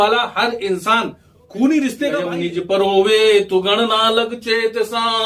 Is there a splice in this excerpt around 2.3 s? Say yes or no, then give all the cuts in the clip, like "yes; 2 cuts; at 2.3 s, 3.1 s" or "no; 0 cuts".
yes; 1 cut; at 2.3 s